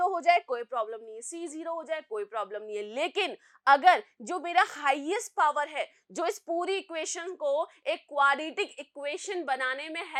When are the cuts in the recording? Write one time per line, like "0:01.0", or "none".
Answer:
none